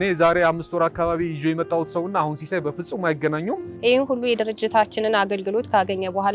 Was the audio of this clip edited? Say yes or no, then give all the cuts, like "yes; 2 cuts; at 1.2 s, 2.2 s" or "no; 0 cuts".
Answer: no; 0 cuts